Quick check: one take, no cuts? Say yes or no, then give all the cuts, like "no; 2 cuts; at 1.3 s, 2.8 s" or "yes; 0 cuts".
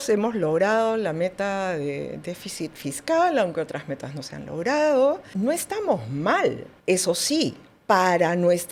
yes; 0 cuts